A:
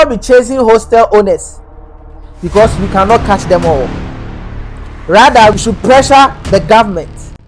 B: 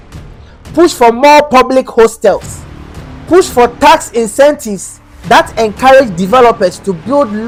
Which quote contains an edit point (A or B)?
A